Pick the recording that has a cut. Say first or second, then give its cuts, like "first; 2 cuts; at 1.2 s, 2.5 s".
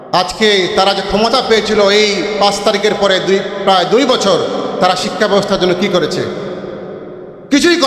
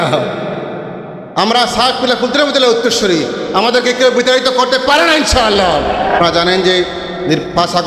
second; 1 cut; at 6.2 s